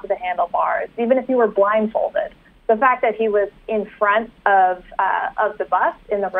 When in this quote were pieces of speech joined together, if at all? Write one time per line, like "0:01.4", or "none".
none